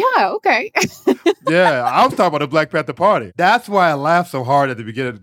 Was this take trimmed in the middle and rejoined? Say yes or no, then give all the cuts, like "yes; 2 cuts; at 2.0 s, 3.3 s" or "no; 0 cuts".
yes; 2 cuts; at 1.5 s, 3.4 s